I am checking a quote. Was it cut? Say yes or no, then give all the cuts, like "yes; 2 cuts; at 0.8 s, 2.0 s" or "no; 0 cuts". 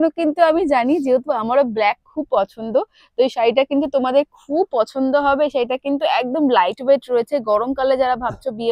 no; 0 cuts